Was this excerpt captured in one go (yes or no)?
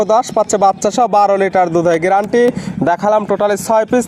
yes